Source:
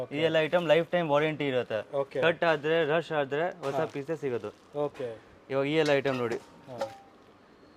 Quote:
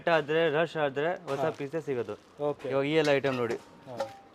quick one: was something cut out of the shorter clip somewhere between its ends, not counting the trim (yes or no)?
yes